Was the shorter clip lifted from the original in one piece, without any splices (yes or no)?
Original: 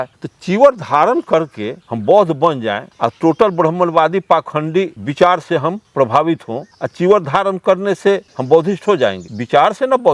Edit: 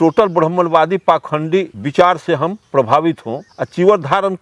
yes